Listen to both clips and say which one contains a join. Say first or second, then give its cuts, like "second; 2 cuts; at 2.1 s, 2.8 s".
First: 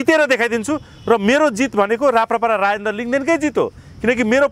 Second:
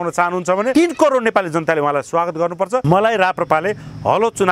second; 2 cuts; at 0.7 s, 2.8 s